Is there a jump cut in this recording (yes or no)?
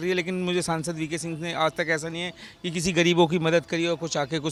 no